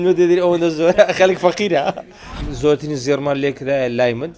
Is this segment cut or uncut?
cut